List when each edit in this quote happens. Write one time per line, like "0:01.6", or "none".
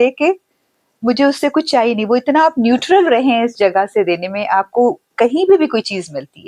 none